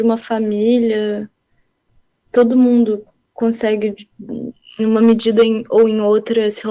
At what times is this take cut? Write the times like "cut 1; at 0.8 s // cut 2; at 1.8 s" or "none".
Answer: none